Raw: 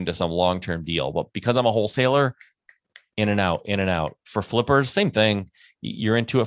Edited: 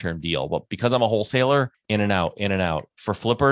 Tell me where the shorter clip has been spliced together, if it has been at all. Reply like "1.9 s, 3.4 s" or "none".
1.8 s